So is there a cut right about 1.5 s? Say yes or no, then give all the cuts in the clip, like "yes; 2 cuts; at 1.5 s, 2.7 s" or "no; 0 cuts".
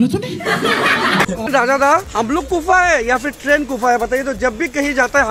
yes; 1 cut; at 1.5 s